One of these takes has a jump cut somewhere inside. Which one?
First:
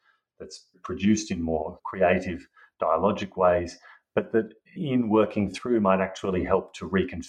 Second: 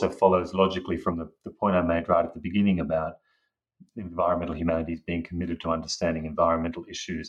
first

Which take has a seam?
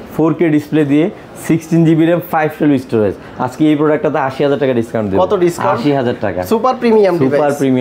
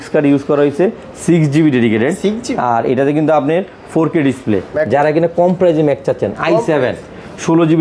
second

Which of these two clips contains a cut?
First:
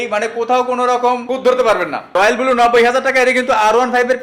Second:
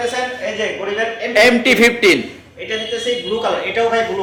first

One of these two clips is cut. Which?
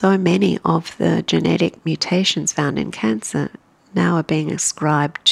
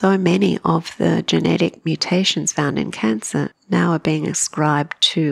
second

